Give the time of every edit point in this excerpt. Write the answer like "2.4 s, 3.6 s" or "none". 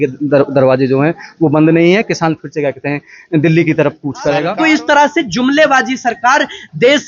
4.5 s